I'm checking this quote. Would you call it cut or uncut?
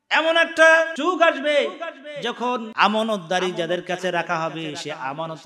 cut